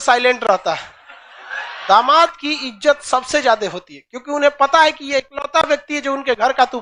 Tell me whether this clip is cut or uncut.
cut